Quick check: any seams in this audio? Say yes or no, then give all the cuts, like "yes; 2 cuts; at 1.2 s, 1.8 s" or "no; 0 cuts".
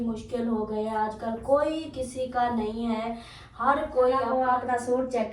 yes; 1 cut; at 4.4 s